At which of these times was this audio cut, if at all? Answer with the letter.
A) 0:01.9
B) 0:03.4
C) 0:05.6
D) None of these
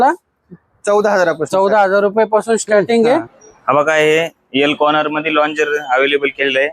B